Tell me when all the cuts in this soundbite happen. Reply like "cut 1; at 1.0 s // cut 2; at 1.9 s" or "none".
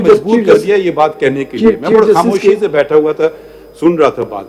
none